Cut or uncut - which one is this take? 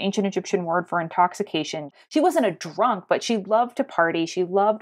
uncut